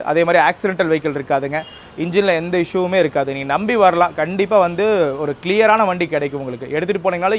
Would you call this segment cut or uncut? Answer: uncut